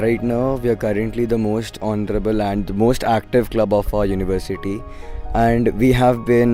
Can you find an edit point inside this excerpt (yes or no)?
no